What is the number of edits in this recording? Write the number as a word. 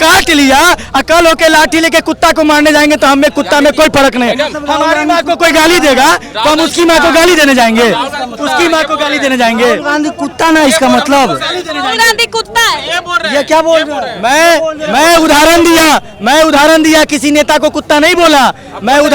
zero